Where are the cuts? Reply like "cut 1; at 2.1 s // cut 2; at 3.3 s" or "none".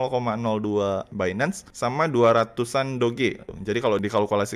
cut 1; at 1.2 s // cut 2; at 3.5 s

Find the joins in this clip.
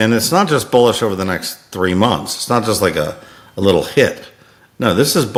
none

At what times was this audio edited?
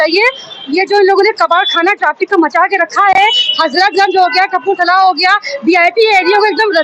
none

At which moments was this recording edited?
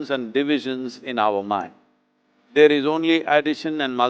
none

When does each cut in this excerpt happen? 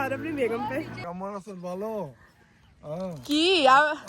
cut 1; at 1.0 s

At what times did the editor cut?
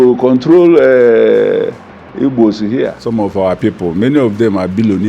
cut 1; at 3.0 s

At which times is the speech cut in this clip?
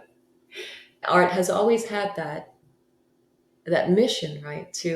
cut 1; at 0.9 s

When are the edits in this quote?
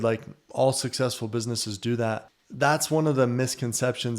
cut 1; at 2.4 s

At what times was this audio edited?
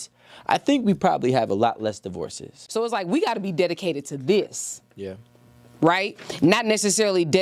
cut 1; at 2.6 s

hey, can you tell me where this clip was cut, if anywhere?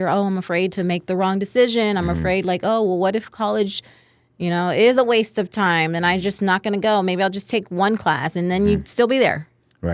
none

